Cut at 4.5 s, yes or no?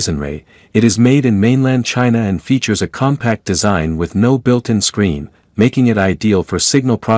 yes